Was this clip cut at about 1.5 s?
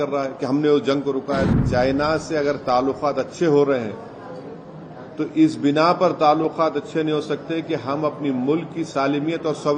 yes; 1 cut; at 1.5 s

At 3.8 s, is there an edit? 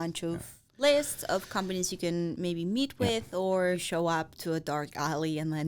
yes; 1 cut; at 3.8 s

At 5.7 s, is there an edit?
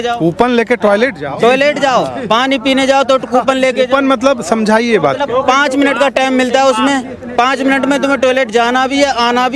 no; 0 cuts

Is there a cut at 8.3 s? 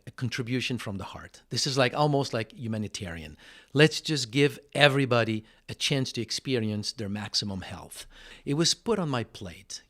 yes; 1 cut; at 8.3 s

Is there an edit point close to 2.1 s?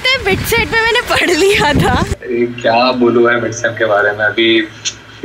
yes; 1 cut; at 2.1 s

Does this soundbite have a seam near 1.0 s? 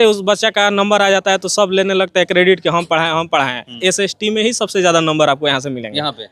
no; 1 cut; at 3.8 s

